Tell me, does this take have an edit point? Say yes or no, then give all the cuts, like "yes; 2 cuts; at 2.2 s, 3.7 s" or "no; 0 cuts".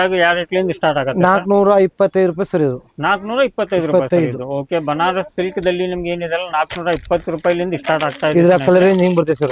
no; 0 cuts